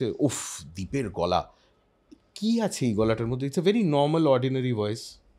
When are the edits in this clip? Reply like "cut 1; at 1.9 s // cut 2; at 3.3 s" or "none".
none